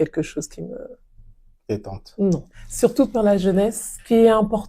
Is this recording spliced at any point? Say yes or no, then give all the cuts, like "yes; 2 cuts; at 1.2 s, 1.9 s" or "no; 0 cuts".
yes; 1 cut; at 2.6 s